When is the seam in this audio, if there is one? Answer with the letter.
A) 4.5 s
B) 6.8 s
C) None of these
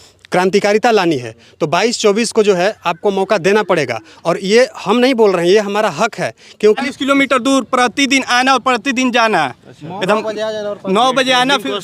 B